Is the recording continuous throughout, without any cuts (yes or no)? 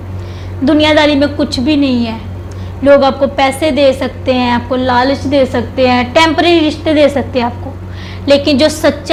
yes